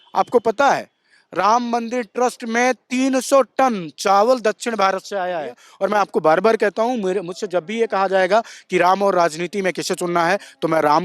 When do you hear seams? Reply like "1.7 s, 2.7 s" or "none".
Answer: 5.7 s